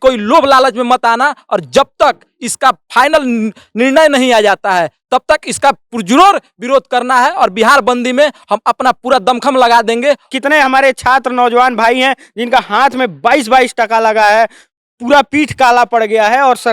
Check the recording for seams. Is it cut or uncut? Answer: cut